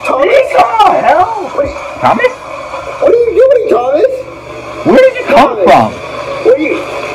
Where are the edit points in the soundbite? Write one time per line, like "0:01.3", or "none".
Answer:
none